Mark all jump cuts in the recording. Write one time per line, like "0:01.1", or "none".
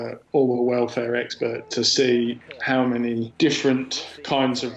0:03.3